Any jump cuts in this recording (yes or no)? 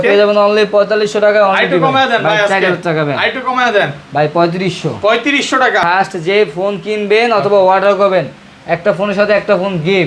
yes